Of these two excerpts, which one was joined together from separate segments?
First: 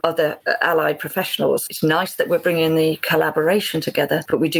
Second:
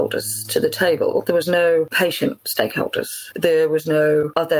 first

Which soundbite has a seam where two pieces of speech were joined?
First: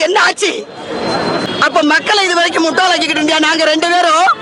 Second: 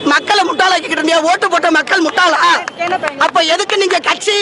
first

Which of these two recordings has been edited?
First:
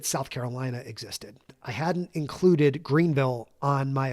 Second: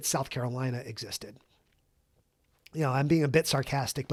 first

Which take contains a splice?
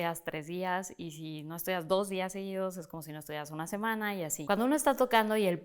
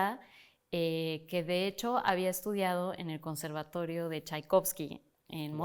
first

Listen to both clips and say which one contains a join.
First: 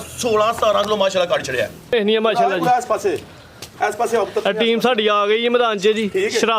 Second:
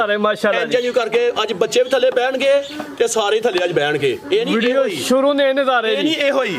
first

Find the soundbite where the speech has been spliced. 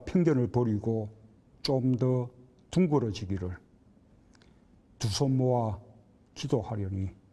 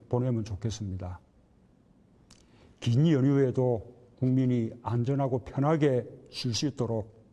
second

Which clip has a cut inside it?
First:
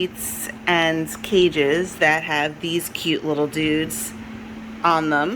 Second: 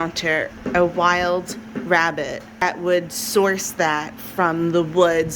second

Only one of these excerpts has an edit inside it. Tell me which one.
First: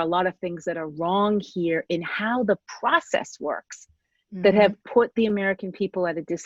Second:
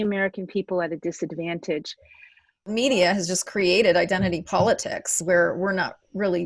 second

